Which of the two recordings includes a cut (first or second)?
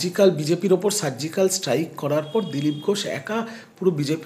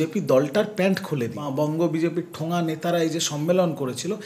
second